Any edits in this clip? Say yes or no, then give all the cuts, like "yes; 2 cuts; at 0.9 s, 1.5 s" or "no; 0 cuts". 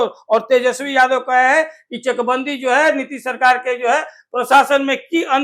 no; 0 cuts